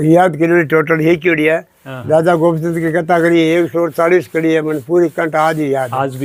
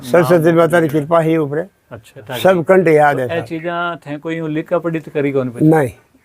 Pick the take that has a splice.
second; 1 cut; at 2.2 s

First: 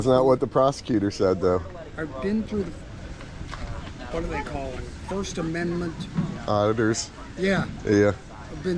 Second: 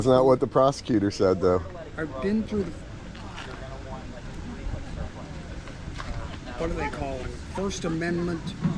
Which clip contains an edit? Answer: first; 1 cut; at 3.0 s

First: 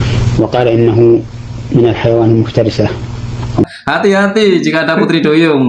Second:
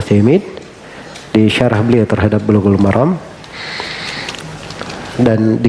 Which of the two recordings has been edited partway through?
first; 1 cut; at 3.6 s

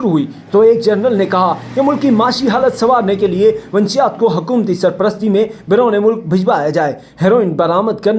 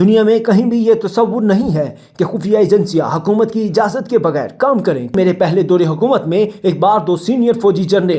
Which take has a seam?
second; 1 cut; at 5.1 s

